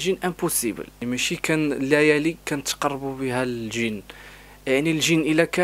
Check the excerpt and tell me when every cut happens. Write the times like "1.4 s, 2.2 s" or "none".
1.0 s